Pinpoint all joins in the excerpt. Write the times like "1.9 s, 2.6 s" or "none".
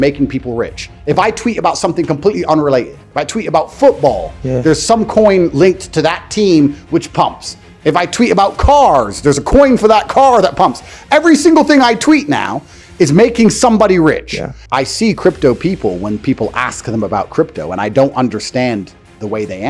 14.5 s